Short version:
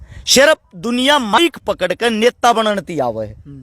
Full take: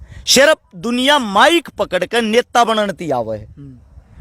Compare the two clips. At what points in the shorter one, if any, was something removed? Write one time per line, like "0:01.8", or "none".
0:01.4